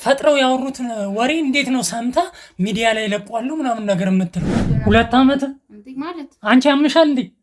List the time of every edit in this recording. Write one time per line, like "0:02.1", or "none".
0:04.7